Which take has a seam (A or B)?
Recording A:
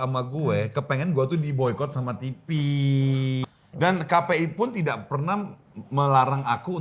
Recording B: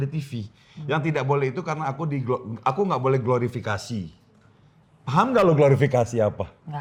A